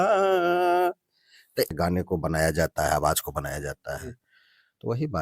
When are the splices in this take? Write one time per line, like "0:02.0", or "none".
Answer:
0:01.7